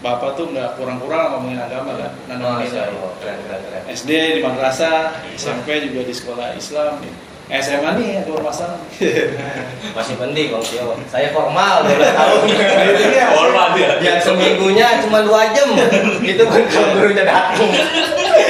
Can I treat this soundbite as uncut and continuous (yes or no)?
yes